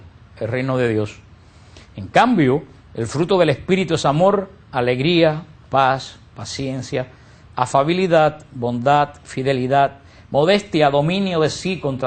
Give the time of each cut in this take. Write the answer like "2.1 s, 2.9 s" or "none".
none